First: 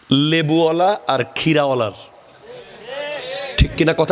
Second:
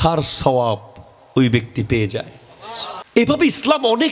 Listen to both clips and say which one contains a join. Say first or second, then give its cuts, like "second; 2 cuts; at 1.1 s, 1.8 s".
second; 1 cut; at 3.2 s